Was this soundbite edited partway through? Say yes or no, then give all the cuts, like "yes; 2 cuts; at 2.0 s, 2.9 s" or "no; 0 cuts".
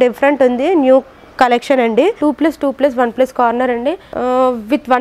yes; 2 cuts; at 2.2 s, 4.1 s